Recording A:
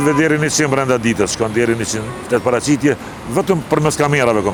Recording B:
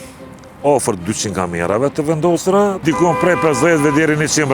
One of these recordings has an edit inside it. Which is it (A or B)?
B